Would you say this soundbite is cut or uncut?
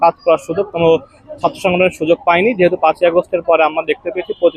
uncut